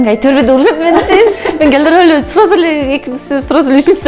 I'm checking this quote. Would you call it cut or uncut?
uncut